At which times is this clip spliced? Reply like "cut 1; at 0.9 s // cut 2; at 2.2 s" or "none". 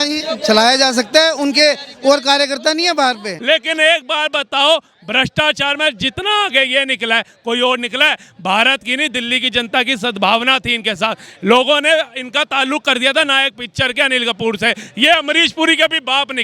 cut 1; at 3.3 s